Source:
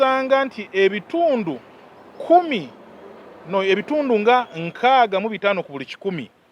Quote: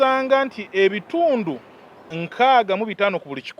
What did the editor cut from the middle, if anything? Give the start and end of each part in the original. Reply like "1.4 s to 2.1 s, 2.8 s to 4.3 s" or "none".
2.1 s to 4.6 s